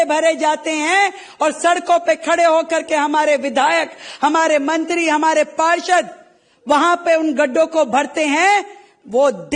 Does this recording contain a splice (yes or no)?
no